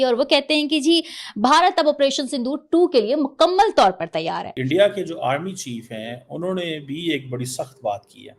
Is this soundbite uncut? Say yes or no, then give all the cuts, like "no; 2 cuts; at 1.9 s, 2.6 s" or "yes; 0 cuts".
no; 1 cut; at 4.5 s